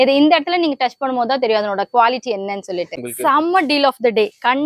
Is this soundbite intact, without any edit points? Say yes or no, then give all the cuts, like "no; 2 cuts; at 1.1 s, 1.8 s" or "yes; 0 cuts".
no; 1 cut; at 3.0 s